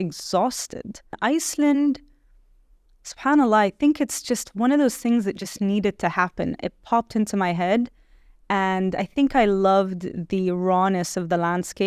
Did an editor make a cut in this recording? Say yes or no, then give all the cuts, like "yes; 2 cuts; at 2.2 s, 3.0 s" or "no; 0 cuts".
yes; 1 cut; at 1.2 s